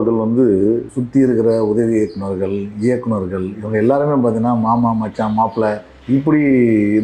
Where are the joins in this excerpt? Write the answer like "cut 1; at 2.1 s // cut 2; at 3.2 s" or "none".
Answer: cut 1; at 0.9 s // cut 2; at 5.9 s